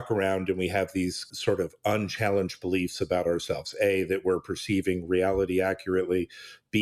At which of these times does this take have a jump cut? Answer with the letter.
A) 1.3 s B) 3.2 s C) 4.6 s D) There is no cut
A